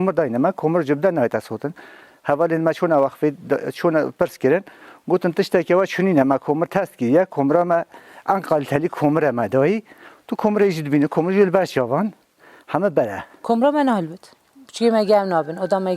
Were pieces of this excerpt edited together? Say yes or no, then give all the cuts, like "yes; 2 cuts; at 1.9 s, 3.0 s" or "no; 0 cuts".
yes; 1 cut; at 13.3 s